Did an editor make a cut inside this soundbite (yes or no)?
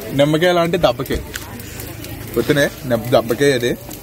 no